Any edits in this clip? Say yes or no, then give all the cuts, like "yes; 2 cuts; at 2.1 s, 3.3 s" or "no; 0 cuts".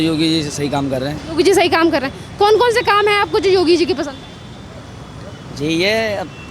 no; 0 cuts